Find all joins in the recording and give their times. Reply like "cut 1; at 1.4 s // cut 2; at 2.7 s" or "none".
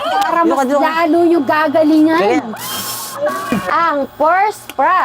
cut 1; at 3.5 s